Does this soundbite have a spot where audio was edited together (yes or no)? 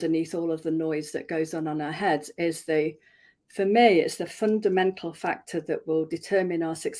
no